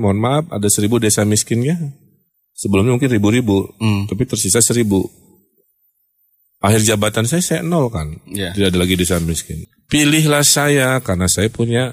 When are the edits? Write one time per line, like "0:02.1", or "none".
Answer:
0:09.5